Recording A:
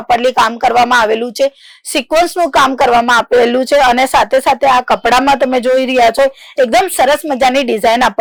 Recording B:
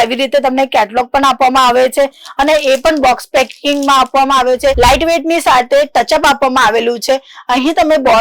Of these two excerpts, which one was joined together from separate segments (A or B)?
B